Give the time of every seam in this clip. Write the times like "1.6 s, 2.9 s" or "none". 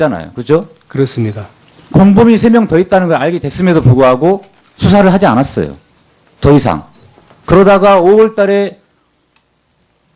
1.9 s